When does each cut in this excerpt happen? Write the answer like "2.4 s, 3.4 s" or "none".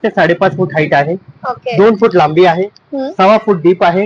none